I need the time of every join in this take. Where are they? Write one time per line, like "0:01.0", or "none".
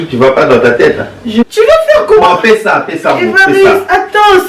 0:01.5